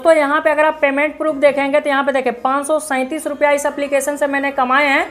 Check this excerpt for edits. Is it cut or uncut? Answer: uncut